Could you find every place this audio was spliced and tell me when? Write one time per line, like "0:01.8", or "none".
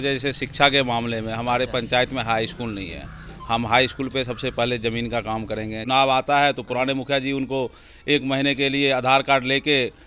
0:05.8

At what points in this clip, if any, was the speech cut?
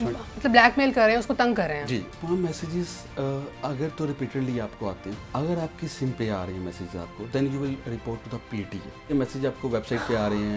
0:02.1
0:05.1
0:09.1

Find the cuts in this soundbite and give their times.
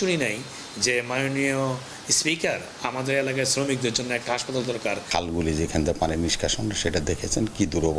0:05.0

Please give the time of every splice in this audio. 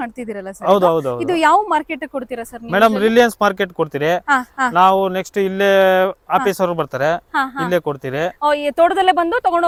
none

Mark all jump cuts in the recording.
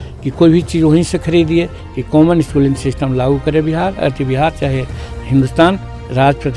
0:01.8

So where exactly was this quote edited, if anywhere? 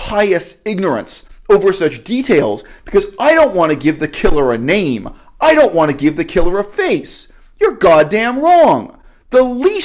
none

